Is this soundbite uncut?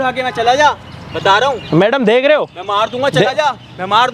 yes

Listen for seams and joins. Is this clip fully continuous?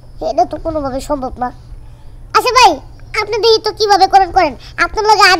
yes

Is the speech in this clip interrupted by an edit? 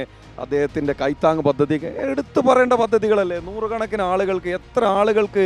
no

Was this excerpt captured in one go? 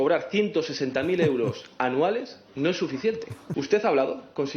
no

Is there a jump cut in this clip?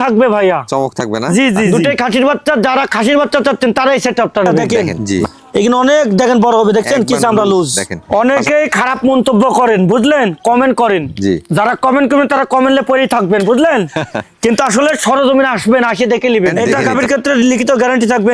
yes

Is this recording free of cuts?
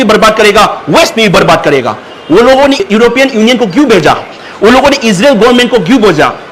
yes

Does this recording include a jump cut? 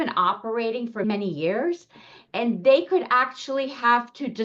yes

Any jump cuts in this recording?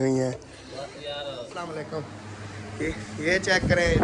yes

